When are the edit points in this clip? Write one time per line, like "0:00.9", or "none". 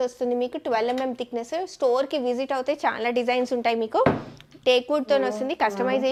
none

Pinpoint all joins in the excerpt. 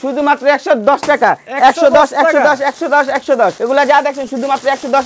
0:03.6

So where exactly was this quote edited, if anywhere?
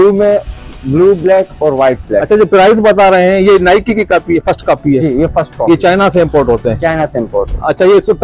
none

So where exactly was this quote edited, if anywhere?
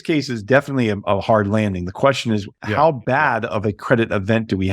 0:02.5

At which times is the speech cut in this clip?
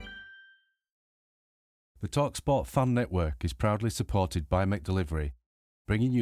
0:01.1

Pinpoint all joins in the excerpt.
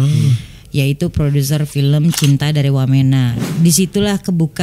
0:03.4

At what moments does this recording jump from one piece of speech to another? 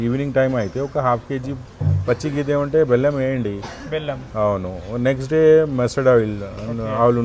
none

